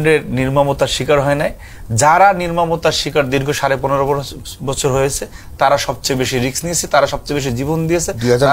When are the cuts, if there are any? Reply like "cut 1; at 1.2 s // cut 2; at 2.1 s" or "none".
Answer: none